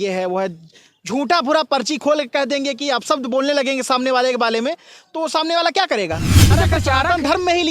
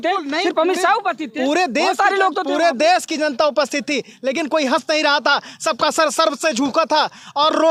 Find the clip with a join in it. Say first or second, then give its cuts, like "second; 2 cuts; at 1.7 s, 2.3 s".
first; 1 cut; at 6.5 s